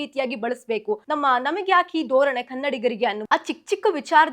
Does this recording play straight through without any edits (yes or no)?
no